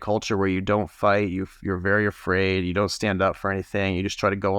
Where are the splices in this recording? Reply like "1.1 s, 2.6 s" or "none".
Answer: none